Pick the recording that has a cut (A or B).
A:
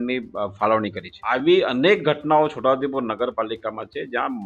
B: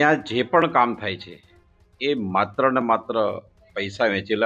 A